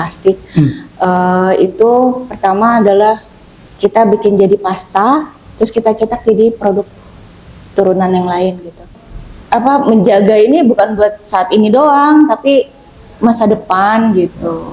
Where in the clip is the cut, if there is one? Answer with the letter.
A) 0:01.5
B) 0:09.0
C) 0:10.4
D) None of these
B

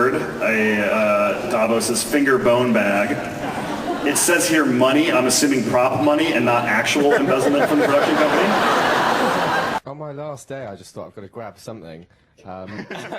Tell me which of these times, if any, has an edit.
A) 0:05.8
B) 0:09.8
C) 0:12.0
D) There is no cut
B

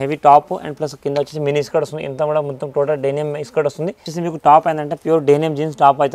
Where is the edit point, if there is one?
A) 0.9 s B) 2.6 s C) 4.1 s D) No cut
C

